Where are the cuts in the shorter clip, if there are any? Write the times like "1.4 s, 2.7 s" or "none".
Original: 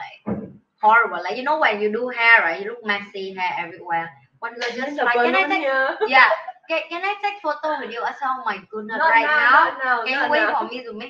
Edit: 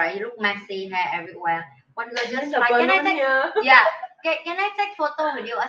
none